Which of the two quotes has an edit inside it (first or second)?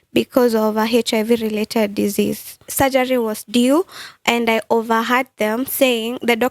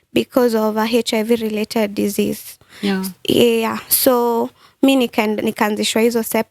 first